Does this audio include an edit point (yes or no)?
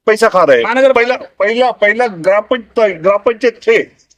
no